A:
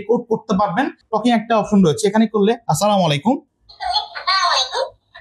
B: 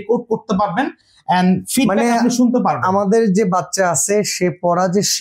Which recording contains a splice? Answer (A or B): A